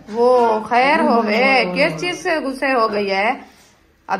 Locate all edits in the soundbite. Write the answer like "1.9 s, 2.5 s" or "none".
none